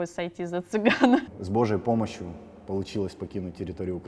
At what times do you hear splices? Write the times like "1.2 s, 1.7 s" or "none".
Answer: 1.3 s